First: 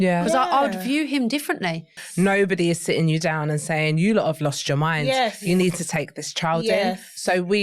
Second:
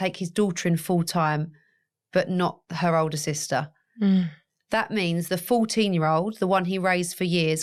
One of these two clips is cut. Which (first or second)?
first